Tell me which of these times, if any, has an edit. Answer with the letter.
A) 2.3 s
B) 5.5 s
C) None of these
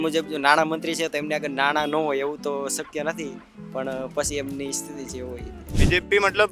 B